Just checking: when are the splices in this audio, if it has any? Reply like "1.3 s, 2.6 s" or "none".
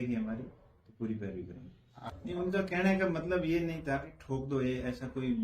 1.8 s